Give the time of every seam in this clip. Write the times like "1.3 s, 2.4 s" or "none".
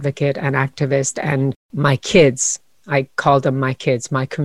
1.6 s